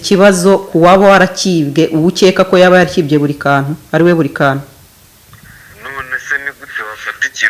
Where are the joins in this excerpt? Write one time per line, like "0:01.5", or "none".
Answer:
none